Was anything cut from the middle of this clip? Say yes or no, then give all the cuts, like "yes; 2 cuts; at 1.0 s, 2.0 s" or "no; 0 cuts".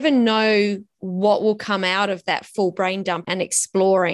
yes; 1 cut; at 3.2 s